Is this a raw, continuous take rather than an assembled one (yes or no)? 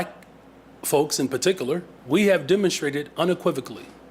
no